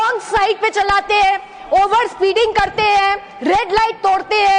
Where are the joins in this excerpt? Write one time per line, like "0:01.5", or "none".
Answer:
none